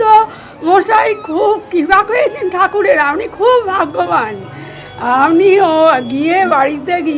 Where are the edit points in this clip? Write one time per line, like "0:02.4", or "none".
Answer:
none